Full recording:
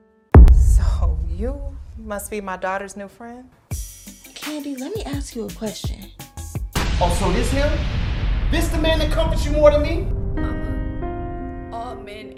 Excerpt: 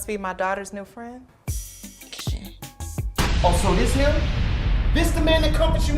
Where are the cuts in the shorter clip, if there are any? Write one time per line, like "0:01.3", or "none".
0:02.2